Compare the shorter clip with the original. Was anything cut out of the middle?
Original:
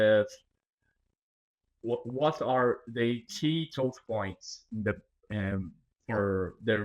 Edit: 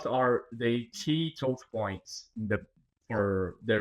yes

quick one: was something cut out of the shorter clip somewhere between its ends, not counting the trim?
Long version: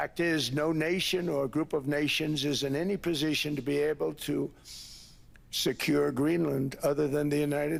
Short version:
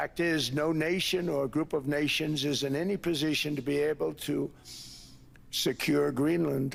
no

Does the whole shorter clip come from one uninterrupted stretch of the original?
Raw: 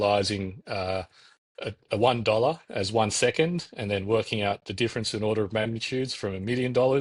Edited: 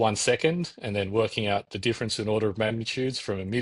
yes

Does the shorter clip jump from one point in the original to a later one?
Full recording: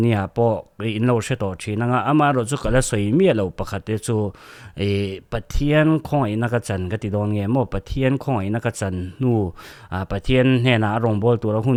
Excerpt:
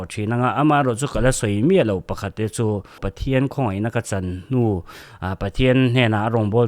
yes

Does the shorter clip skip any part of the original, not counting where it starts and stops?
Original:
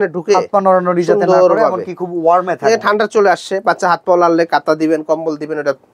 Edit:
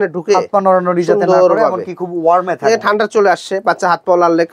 no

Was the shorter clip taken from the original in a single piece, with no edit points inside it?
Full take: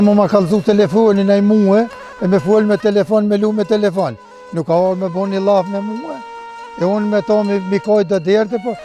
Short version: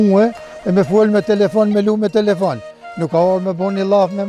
yes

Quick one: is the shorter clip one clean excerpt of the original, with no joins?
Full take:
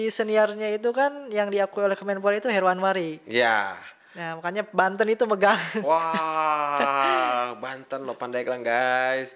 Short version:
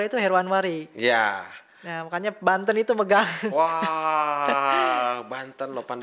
yes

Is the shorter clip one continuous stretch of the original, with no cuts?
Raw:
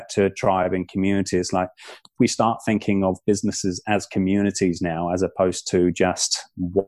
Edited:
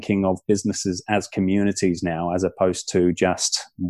yes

